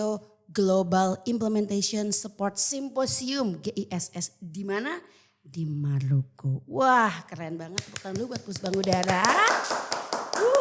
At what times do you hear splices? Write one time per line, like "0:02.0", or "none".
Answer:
none